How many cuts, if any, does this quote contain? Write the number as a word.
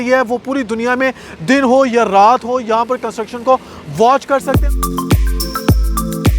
one